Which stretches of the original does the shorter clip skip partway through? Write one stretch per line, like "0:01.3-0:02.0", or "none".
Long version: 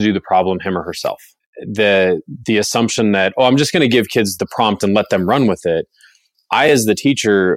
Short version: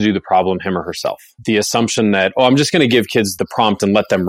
0:01.3-0:02.3

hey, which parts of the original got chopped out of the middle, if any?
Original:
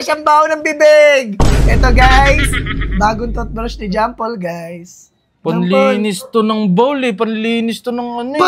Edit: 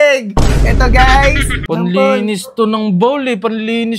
0:02.6-0:05.3

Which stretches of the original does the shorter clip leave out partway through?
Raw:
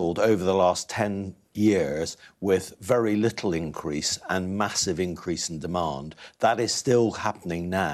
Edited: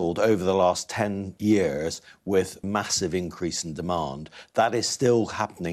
0:01.3-0:01.4
0:02.8-0:04.5

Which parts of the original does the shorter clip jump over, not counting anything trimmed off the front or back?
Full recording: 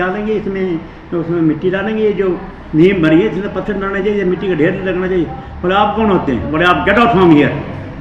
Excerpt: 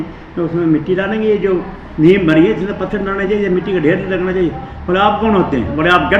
none

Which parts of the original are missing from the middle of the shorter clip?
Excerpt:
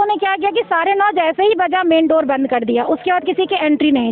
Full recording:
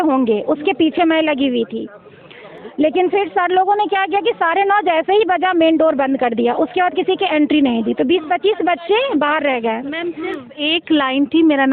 none

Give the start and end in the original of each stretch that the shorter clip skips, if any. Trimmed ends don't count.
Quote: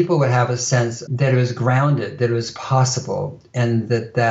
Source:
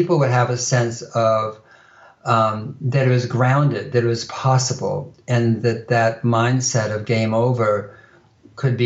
0:01.0-0:02.8

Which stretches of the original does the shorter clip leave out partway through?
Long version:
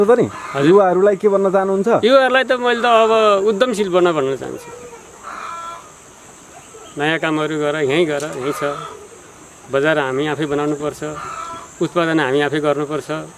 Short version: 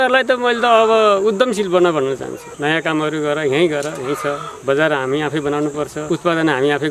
0:04.6-0:06.8
0:08.9-0:09.6
0:11.0-0:11.7

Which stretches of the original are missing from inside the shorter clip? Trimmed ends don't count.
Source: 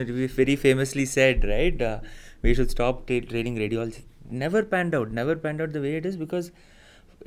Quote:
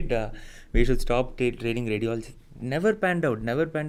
none

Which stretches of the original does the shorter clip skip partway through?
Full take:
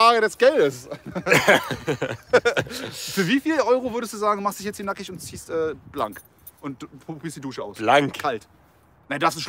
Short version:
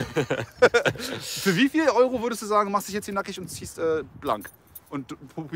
none

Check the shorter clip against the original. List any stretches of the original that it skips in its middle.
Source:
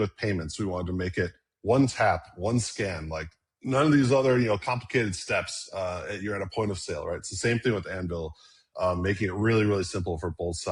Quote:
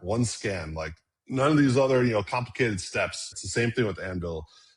0:05.7-0:07.2

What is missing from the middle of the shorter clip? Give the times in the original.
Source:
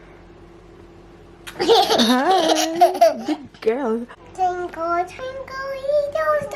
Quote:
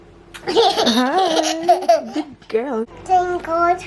0:04.1-0:04.2

